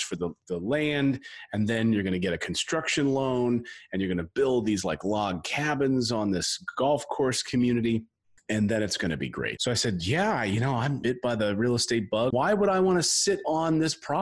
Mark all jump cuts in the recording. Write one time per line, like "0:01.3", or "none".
0:09.5
0:11.0
0:12.3